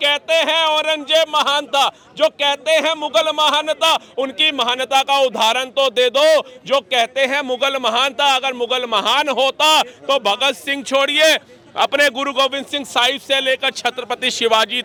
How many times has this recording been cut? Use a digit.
0